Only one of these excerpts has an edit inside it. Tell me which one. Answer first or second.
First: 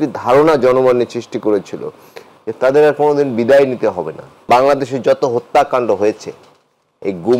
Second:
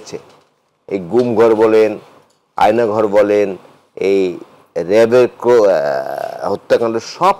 first